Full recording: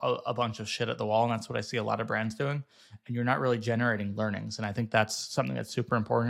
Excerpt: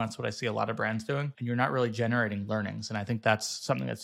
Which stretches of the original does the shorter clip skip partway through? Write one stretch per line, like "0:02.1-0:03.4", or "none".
0:02.6-0:03.0